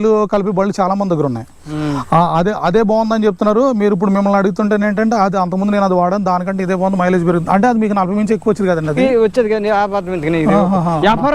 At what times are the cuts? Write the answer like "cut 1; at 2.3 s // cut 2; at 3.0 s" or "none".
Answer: none